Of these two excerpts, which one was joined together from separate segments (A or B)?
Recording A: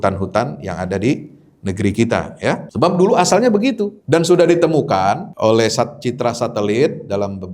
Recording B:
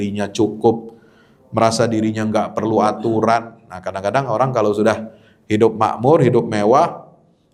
A